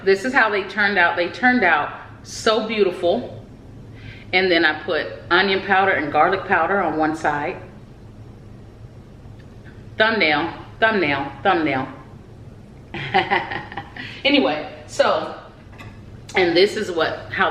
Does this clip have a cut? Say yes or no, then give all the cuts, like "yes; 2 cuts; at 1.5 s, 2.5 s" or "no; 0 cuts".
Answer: no; 0 cuts